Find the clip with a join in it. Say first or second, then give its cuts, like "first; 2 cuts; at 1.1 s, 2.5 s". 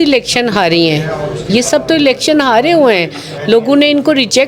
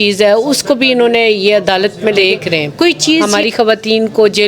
second; 1 cut; at 3.2 s